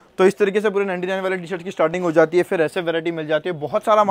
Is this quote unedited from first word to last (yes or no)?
yes